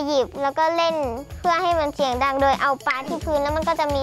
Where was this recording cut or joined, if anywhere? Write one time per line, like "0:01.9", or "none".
none